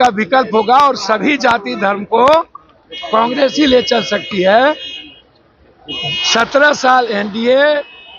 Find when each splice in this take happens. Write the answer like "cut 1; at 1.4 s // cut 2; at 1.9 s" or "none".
none